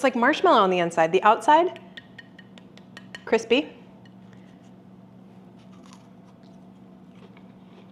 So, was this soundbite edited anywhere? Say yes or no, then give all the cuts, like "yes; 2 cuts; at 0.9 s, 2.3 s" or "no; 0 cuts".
no; 0 cuts